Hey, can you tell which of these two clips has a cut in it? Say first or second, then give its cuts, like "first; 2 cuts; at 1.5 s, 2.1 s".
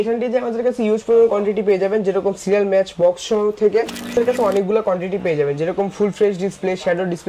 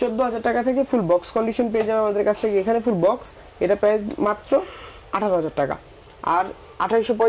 first; 1 cut; at 4.2 s